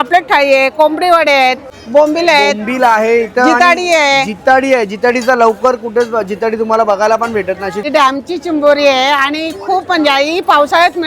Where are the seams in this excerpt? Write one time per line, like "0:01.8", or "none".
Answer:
0:01.8
0:07.9